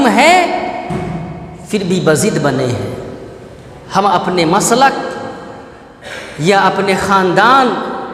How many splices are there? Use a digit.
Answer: 0